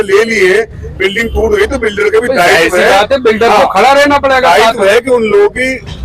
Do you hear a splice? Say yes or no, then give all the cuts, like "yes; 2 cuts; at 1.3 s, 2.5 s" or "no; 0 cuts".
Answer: no; 0 cuts